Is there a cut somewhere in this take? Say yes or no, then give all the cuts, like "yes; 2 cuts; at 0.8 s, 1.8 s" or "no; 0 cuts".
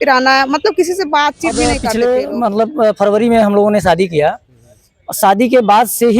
yes; 1 cut; at 1.7 s